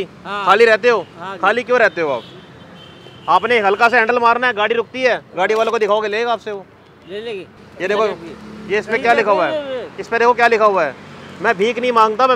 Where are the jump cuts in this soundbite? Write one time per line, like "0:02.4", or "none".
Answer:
none